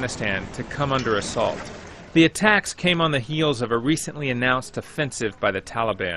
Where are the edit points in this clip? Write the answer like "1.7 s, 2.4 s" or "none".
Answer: 1.5 s